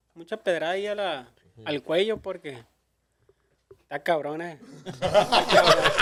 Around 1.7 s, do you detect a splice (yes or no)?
no